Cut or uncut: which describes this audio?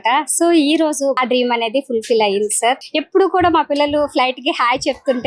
cut